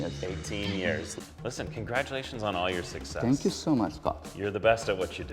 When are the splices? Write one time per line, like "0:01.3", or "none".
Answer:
0:01.1